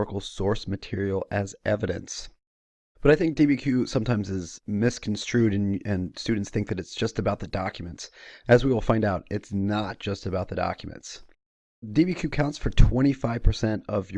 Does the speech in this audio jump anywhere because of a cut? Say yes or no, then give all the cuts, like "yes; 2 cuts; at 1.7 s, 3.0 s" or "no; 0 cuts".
no; 0 cuts